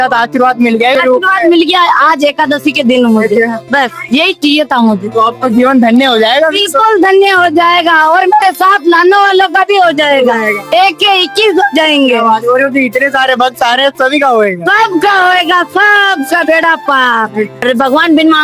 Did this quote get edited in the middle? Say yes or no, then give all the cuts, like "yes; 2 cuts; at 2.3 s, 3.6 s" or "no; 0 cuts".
yes; 2 cuts; at 0.9 s, 17.6 s